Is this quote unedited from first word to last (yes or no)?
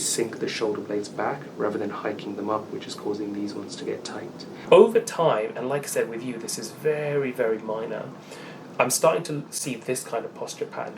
no